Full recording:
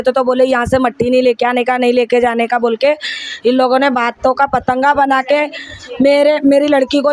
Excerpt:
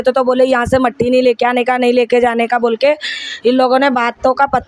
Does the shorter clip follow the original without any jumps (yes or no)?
yes